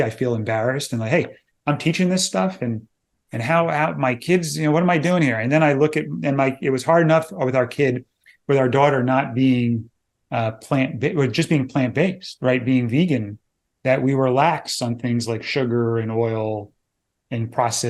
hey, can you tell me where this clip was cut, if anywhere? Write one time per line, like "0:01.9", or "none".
none

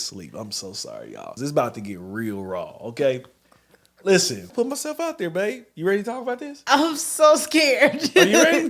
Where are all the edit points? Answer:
0:01.3
0:04.5

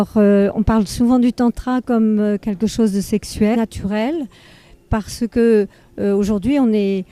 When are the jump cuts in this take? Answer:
none

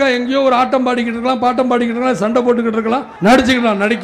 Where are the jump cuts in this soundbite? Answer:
0:03.1

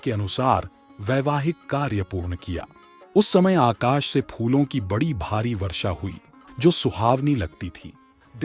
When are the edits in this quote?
none

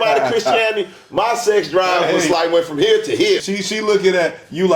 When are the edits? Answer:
0:03.4

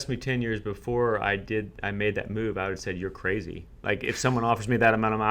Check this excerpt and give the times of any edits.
none

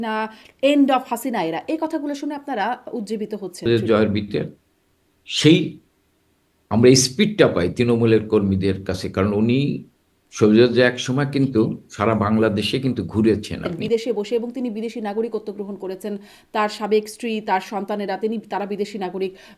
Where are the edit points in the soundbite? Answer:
0:03.6
0:13.7

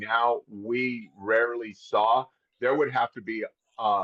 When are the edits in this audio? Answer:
none

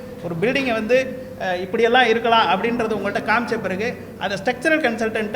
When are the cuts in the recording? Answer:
none

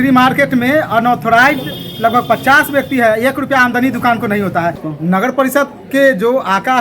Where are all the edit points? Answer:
0:04.8

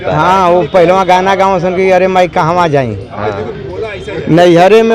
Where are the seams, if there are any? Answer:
none

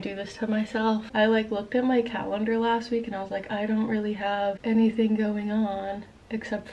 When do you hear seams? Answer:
0:01.1
0:04.6

